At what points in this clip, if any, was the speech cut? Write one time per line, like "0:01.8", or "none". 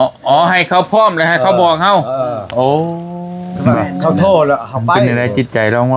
0:05.1